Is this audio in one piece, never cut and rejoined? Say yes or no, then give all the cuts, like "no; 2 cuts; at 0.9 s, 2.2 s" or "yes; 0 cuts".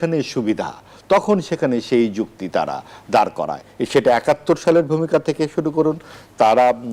yes; 0 cuts